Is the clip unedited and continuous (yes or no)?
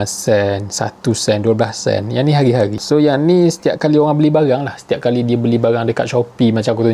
yes